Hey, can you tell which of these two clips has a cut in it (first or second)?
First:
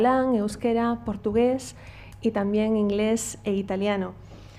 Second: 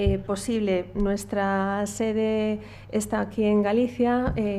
second